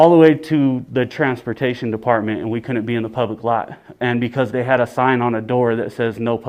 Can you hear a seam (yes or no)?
no